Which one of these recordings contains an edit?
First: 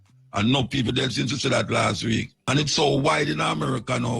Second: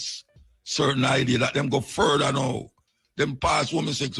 first; 1 cut; at 2.3 s

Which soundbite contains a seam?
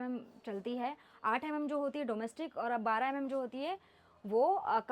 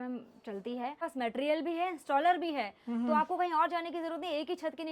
second; 1 cut; at 1.0 s

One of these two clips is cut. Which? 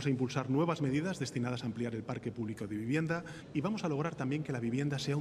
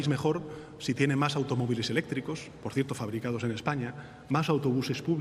first; 1 cut; at 3.4 s

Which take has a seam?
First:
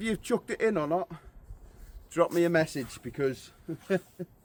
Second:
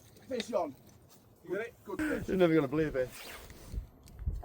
second; 1 cut; at 2.0 s

